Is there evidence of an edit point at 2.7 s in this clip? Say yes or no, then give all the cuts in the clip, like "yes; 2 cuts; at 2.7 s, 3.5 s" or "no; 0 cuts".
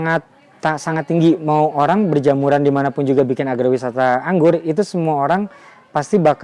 no; 0 cuts